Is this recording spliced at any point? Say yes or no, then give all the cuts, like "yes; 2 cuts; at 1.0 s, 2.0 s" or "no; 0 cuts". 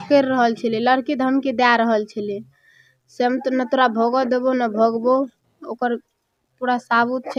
no; 0 cuts